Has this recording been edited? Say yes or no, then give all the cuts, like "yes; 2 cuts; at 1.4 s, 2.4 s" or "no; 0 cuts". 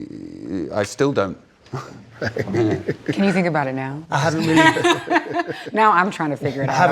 yes; 1 cut; at 3.1 s